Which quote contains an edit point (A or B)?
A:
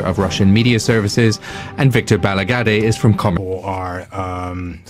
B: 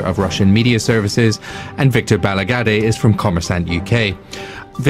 B